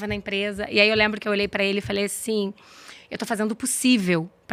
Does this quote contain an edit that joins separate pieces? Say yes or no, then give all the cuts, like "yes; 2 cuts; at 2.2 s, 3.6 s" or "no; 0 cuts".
no; 0 cuts